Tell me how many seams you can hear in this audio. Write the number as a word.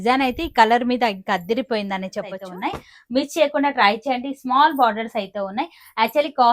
one